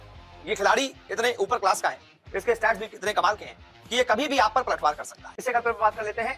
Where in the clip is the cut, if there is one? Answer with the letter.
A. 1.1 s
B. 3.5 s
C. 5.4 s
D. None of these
C